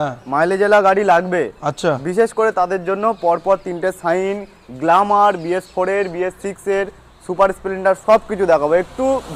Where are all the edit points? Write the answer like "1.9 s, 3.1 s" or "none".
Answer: none